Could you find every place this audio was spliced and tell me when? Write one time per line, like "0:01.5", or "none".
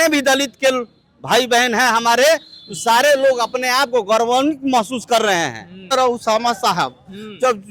0:05.9